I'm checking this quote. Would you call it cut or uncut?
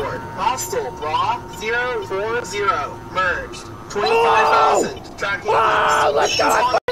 uncut